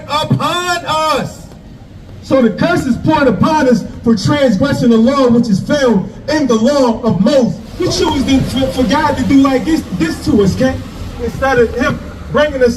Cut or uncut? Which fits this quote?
cut